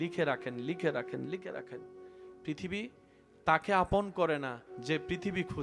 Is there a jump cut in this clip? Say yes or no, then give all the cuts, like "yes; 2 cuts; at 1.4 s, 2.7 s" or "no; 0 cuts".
no; 0 cuts